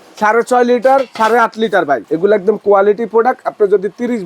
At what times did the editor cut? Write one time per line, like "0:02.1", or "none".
0:02.1